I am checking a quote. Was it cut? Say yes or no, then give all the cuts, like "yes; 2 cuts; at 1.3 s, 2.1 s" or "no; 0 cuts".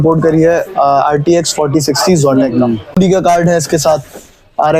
yes; 1 cut; at 3.0 s